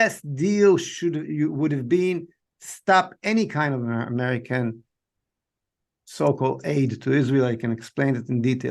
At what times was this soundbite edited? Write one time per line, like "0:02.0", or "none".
none